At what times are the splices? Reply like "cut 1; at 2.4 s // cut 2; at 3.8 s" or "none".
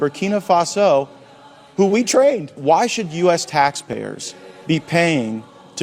cut 1; at 2.5 s